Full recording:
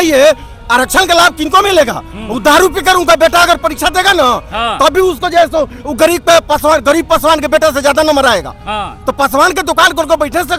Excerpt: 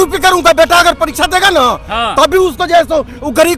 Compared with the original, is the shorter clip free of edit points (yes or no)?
yes